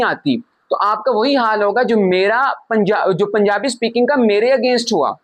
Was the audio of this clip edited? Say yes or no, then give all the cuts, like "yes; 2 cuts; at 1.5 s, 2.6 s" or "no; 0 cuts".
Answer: no; 0 cuts